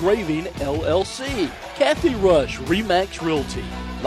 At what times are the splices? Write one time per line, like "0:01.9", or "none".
0:01.6